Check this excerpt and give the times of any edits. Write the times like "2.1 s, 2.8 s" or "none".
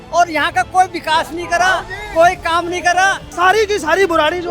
3.3 s